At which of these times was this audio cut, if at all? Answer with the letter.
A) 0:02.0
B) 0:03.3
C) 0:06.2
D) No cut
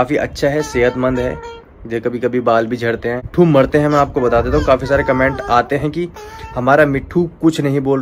B